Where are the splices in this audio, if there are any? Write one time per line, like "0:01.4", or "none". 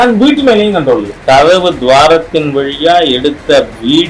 0:01.1